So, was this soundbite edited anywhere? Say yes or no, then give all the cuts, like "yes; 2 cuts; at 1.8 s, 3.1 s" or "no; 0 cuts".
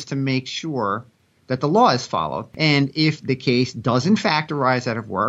yes; 1 cut; at 2.5 s